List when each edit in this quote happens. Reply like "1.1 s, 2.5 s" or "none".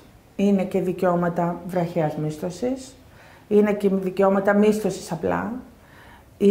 none